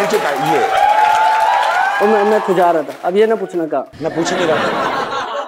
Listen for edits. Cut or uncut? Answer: cut